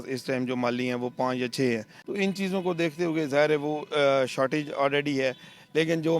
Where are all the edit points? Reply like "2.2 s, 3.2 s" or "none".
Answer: 2.0 s